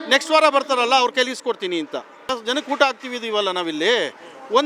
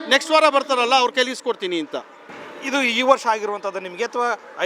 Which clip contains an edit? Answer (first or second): first